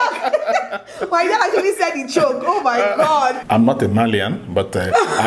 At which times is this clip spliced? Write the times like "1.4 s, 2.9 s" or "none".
3.4 s